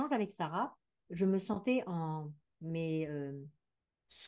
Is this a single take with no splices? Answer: yes; 0 cuts

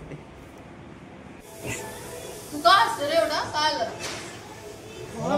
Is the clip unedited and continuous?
no; 1 cut; at 1.7 s

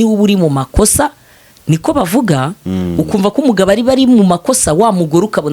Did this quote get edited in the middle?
no; 0 cuts

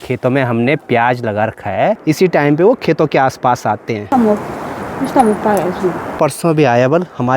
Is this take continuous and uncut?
no; 3 cuts; at 2.0 s, 4.1 s, 6.1 s

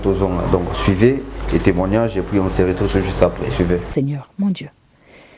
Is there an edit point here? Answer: yes; 1 cut; at 3.9 s

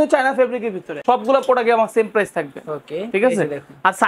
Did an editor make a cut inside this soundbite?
yes; 1 cut; at 1.0 s

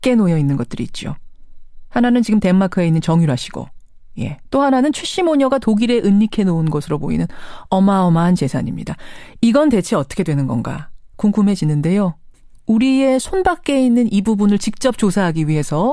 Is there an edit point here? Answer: yes; 1 cut; at 10.4 s

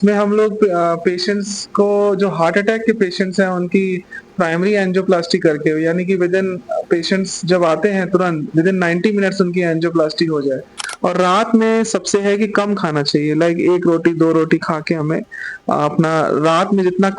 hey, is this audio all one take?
no; 1 cut; at 10.8 s

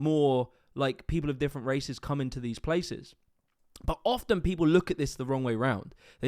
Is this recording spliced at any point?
no; 0 cuts

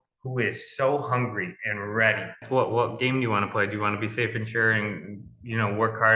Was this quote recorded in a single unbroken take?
no; 1 cut; at 2.4 s

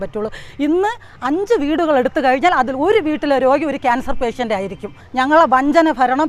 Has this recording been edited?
yes; 1 cut; at 5.0 s

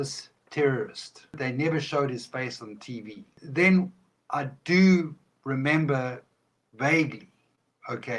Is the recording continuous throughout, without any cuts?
no; 2 cuts; at 1.4 s, 3.4 s

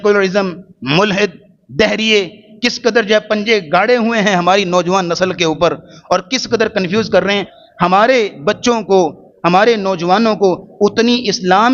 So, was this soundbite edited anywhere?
yes; 1 cut; at 7.5 s

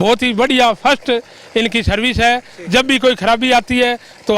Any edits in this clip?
no; 0 cuts

